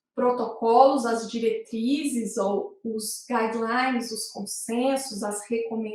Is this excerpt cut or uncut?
uncut